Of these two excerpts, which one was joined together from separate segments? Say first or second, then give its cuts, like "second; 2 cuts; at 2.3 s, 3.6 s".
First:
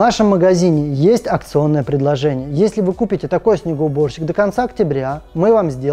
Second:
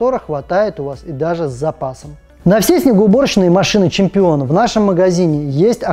second; 1 cut; at 2.2 s